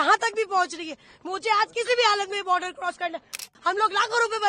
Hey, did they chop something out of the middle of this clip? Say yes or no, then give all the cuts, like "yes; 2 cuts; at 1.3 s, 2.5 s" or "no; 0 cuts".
yes; 1 cut; at 3.4 s